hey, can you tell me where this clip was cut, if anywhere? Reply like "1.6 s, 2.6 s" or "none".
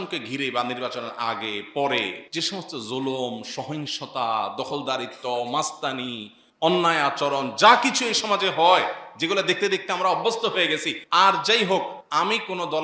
2.2 s, 10.9 s, 12.0 s